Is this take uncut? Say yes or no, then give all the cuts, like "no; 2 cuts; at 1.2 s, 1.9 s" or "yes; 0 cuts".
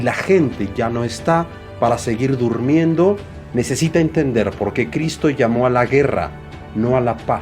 no; 1 cut; at 3.3 s